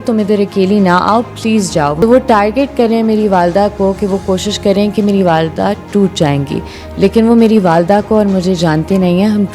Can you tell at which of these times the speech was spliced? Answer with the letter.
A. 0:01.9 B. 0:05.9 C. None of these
A